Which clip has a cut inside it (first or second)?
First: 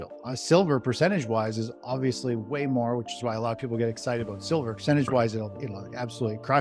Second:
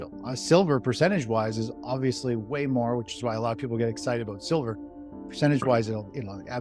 first